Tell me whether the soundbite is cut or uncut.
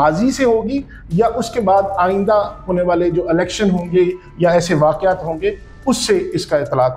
uncut